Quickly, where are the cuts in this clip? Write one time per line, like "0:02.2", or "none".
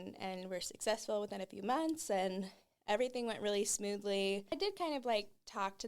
0:04.5